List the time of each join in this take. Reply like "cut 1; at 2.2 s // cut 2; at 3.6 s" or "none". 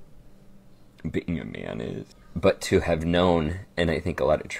cut 1; at 2.0 s